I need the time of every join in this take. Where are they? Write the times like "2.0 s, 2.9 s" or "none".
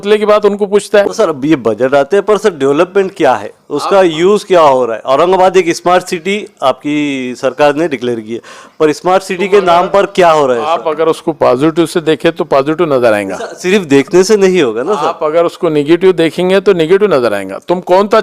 1.1 s